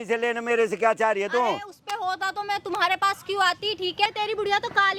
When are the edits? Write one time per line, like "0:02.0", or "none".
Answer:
0:04.1